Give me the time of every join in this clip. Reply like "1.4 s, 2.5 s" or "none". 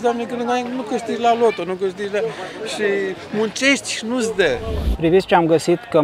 4.9 s